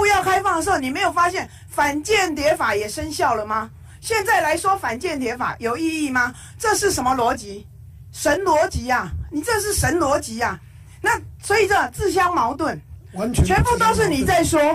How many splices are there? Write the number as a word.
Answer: zero